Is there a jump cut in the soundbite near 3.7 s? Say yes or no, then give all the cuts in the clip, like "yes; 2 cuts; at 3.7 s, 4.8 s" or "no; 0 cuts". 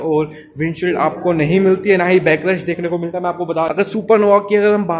yes; 1 cut; at 3.7 s